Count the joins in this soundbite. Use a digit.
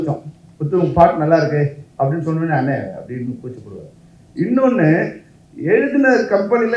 0